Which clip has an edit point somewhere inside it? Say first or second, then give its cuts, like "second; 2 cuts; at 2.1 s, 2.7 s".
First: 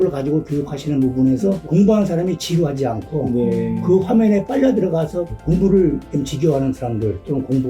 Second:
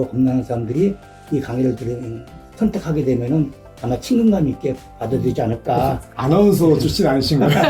first; 1 cut; at 5.3 s